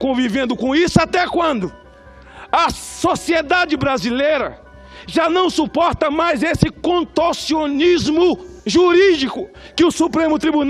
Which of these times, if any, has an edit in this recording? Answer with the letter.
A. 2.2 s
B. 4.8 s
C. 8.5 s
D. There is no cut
C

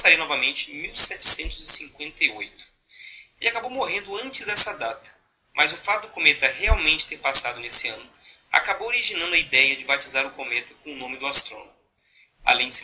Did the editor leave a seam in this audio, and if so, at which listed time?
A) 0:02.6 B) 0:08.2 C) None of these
B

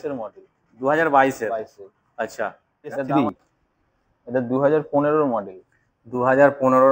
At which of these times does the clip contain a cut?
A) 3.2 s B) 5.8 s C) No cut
A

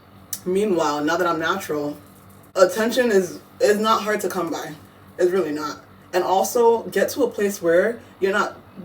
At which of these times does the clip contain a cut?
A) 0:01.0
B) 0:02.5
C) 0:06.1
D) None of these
B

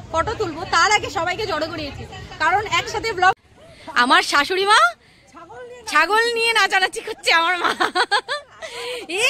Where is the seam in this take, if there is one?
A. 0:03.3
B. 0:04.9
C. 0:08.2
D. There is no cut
A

